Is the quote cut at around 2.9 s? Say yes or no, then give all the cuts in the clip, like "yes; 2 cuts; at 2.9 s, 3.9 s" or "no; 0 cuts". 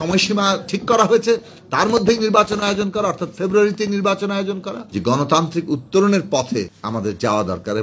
no; 2 cuts; at 4.8 s, 6.8 s